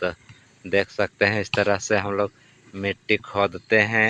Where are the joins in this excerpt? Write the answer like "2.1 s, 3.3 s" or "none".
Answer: none